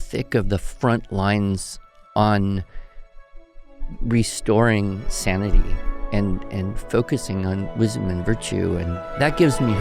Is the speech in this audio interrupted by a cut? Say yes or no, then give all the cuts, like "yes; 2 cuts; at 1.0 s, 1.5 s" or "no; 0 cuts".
yes; 1 cut; at 8.9 s